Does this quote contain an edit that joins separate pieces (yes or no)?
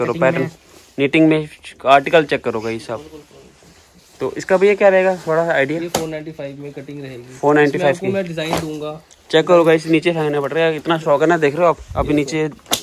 no